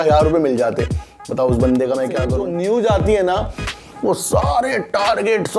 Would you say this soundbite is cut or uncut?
cut